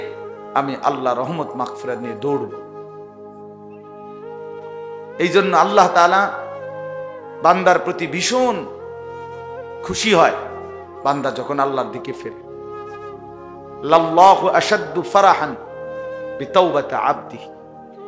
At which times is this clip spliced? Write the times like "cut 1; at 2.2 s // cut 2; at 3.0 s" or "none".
cut 1; at 8.6 s // cut 2; at 9.9 s // cut 3; at 12.1 s // cut 4; at 13.6 s